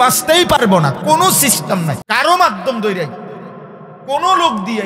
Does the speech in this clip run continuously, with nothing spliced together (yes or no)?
no